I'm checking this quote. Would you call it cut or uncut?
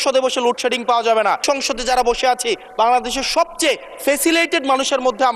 cut